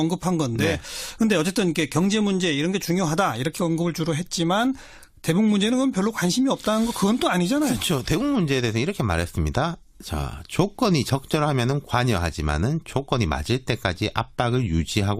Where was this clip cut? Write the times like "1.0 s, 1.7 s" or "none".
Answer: 6.4 s